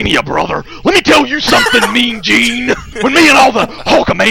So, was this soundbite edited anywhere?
yes; 1 cut; at 2.9 s

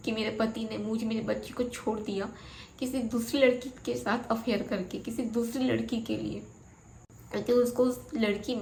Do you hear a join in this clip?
no; 0 cuts

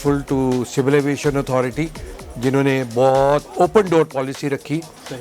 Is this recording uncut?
no; 1 cut; at 3.5 s

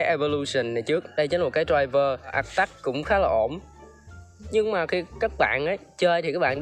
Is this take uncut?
no; 1 cut; at 2.4 s

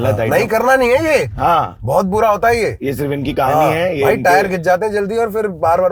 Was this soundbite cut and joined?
no; 0 cuts

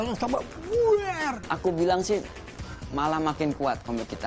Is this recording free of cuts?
no; 1 cut; at 1.3 s

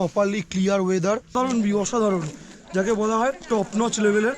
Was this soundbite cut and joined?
yes; 1 cut; at 1.3 s

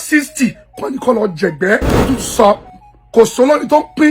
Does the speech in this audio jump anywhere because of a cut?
yes; 1 cut; at 2.0 s

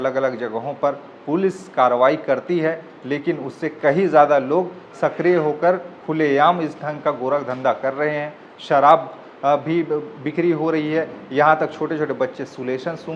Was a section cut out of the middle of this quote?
no; 0 cuts

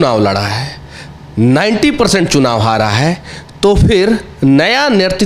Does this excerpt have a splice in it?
no; 0 cuts

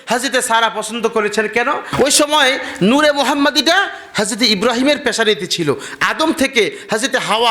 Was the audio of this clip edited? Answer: yes; 1 cut; at 1.9 s

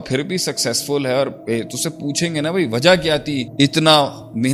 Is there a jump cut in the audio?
yes; 1 cut; at 3.5 s

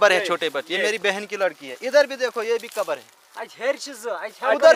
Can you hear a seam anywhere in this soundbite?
no; 0 cuts

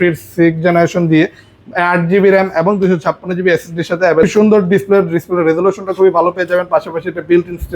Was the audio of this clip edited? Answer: yes; 1 cut; at 4.2 s

